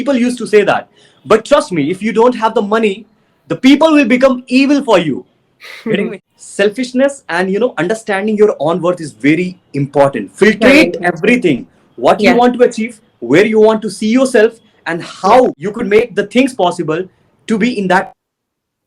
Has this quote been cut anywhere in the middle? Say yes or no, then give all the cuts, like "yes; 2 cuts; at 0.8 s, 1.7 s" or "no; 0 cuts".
yes; 2 cuts; at 6.2 s, 15.6 s